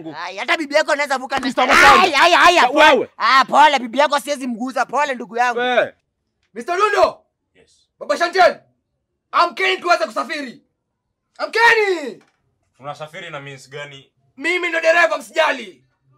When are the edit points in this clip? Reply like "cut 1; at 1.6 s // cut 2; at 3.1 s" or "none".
cut 1; at 6.1 s